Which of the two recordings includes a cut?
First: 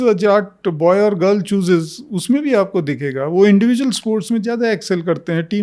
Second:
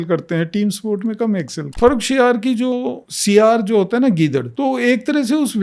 second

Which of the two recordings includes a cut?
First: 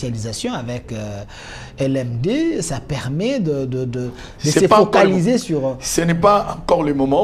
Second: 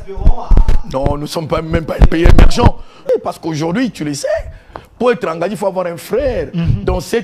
second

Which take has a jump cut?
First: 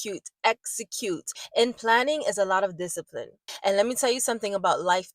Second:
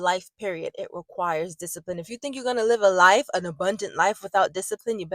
first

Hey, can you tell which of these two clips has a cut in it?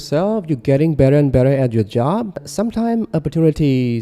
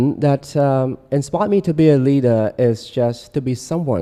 first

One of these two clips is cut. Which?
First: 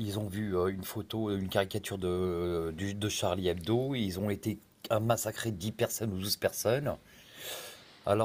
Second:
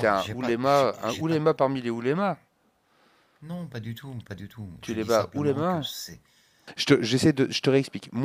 second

